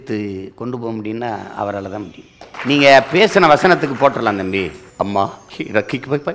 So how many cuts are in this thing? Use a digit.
2